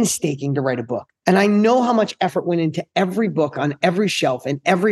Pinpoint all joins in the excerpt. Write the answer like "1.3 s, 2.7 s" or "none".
1.0 s